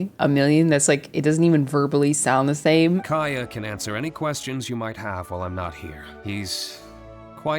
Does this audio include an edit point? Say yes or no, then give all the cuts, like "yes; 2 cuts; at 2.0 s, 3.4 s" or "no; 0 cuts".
yes; 2 cuts; at 3.0 s, 6.2 s